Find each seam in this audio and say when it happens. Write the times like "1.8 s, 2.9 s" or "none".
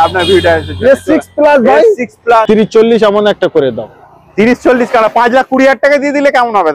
2.4 s